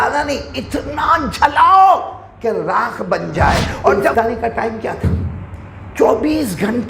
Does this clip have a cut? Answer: yes; 1 cut; at 4.0 s

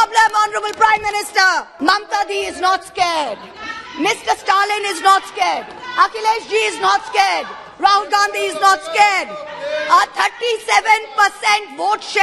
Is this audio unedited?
no; 1 cut; at 1.7 s

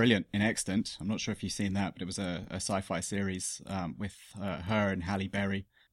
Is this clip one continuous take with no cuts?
yes; 0 cuts

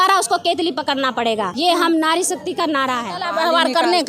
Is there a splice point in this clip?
yes; 2 cuts; at 1.5 s, 3.1 s

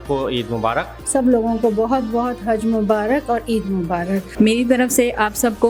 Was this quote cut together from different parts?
yes; 2 cuts; at 1.0 s, 4.3 s

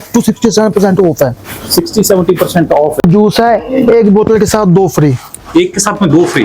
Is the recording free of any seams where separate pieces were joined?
no; 1 cut; at 3.0 s

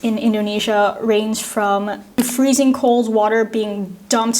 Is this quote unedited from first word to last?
no; 1 cut; at 2.1 s

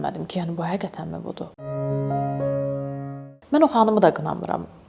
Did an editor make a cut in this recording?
no; 0 cuts

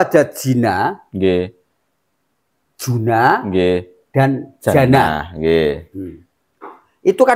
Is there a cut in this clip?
no; 0 cuts

